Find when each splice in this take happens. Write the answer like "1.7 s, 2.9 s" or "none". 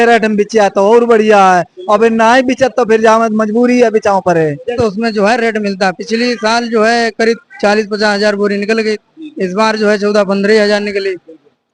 4.7 s